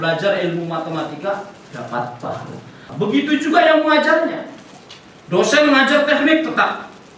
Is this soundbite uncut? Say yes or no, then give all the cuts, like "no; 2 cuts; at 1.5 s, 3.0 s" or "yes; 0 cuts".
no; 1 cut; at 2.9 s